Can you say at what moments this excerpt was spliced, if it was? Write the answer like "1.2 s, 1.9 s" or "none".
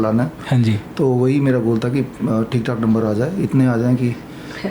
none